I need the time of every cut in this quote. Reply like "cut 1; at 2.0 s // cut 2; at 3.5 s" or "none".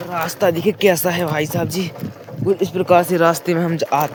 none